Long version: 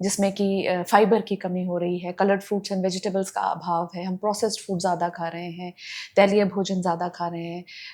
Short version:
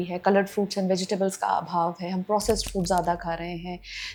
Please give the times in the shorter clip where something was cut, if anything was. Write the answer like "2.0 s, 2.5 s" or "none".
none